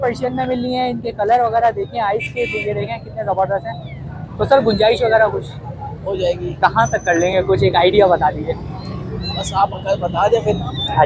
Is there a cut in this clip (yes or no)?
no